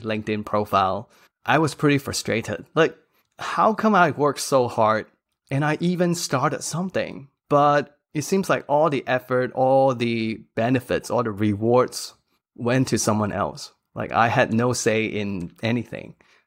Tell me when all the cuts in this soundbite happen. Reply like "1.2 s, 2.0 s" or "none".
none